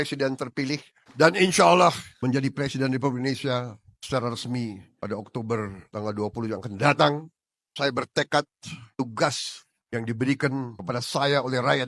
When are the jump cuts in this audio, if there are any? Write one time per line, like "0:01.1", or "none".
0:01.0
0:02.1

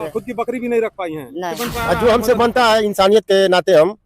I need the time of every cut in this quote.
0:01.5

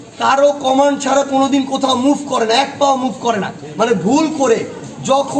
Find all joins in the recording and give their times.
0:03.6

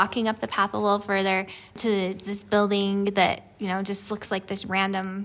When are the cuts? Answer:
0:01.8

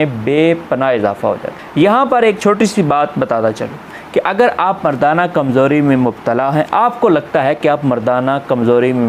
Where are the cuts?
none

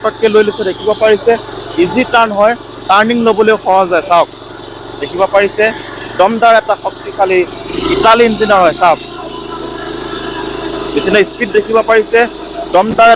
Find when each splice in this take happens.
none

